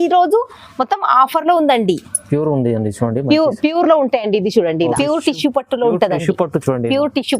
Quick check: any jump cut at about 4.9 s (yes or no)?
yes